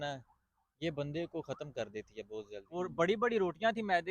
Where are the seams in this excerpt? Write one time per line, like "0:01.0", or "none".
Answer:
0:02.7